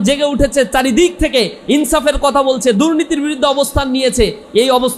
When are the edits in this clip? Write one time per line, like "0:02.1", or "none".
none